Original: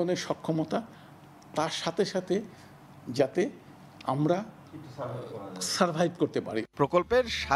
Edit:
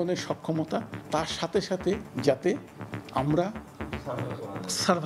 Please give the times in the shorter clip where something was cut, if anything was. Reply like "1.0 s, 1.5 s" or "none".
0.9 s, 2.1 s